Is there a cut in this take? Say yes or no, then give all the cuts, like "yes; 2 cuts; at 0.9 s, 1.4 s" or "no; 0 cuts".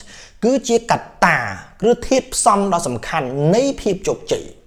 no; 0 cuts